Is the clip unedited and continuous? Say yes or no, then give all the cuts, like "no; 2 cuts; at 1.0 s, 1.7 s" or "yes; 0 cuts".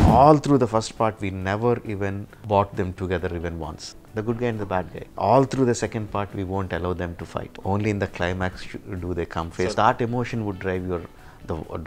no; 5 cuts; at 2.3 s, 3.9 s, 5.0 s, 7.5 s, 9.7 s